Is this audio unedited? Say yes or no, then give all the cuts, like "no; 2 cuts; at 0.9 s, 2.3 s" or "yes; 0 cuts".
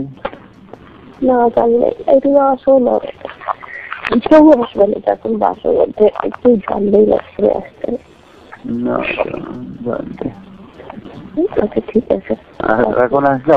yes; 0 cuts